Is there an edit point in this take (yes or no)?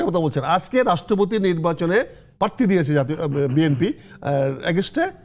no